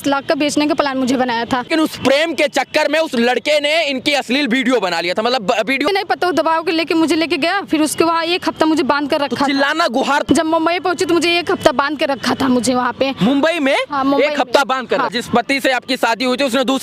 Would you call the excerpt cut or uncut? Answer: cut